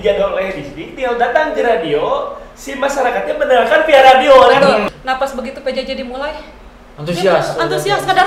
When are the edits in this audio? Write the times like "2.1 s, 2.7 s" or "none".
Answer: 4.8 s